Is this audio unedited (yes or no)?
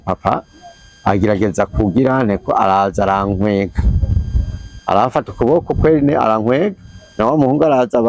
yes